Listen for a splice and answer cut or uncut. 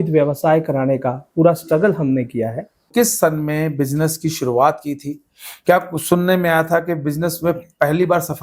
cut